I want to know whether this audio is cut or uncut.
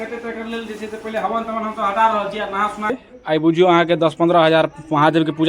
cut